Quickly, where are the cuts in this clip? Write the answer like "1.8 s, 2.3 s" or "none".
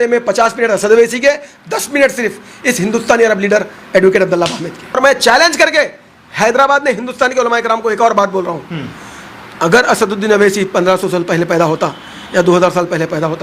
5.0 s